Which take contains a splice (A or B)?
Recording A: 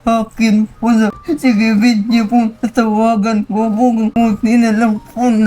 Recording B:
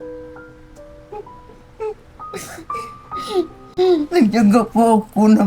A